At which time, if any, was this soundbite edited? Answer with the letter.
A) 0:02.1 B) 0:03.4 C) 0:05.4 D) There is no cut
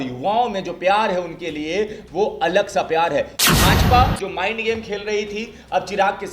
B